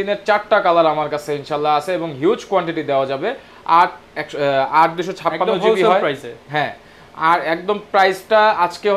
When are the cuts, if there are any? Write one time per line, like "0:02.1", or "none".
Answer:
none